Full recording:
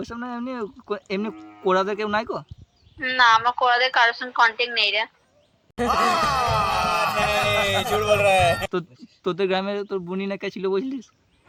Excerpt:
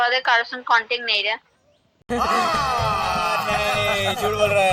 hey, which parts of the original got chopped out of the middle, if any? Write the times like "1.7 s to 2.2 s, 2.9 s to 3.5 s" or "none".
none